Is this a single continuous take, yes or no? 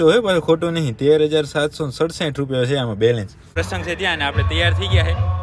no